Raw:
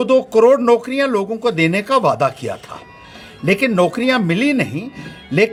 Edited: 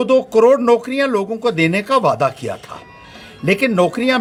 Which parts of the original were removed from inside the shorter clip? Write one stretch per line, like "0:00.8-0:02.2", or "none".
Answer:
none